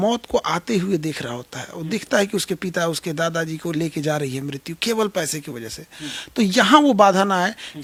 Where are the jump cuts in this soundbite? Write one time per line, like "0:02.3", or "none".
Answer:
none